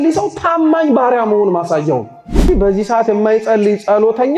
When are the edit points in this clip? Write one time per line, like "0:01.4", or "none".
0:02.5